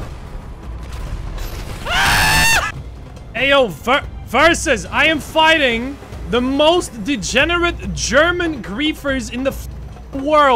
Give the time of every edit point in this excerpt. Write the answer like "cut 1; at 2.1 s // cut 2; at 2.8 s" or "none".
cut 1; at 2.7 s